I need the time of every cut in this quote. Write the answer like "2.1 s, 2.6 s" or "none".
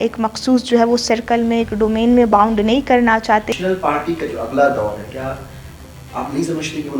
3.5 s